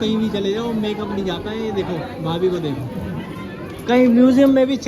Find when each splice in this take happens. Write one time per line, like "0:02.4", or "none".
none